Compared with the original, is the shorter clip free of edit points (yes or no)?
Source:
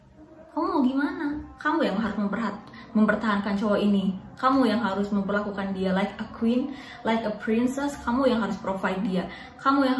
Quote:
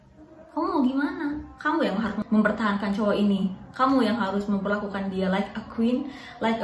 no